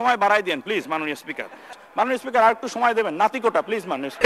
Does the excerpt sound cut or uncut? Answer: cut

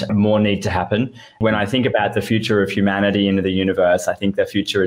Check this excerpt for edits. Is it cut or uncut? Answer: cut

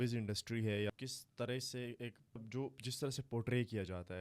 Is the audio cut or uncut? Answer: cut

